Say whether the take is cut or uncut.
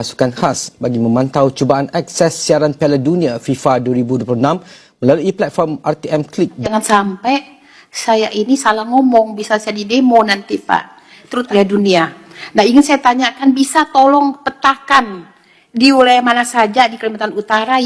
cut